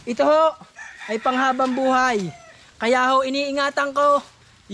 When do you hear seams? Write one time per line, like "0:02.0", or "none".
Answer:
none